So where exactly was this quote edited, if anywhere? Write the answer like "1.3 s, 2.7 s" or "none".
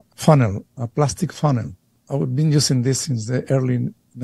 none